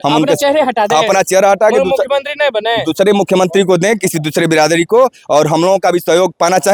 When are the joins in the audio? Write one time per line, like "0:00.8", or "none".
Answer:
none

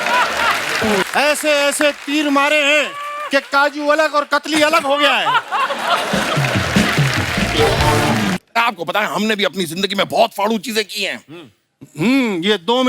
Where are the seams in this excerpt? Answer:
0:01.0
0:08.4

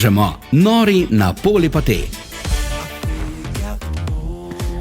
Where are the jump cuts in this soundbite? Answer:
0:02.9

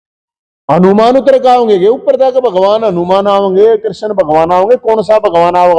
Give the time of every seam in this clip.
none

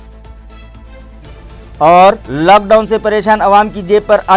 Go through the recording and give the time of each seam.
0:01.0

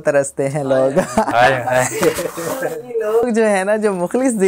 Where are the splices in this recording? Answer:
none

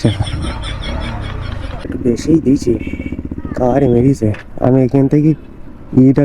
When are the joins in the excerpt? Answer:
0:01.9

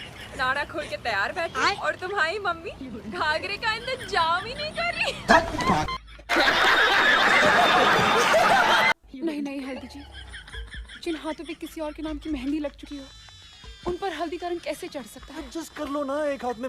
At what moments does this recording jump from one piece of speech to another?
0:09.0

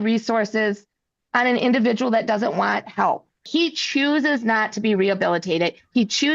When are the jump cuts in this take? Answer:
0:03.4

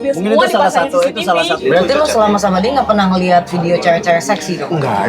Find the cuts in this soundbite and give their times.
0:01.6

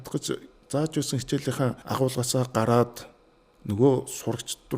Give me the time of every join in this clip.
0:01.8

